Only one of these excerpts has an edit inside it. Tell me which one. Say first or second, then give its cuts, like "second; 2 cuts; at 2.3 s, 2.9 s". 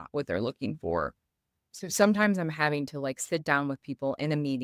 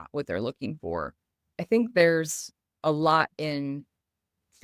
second; 1 cut; at 1.5 s